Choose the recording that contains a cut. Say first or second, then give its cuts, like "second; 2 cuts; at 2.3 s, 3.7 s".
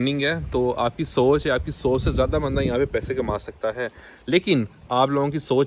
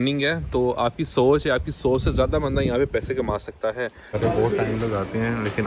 second; 1 cut; at 4.1 s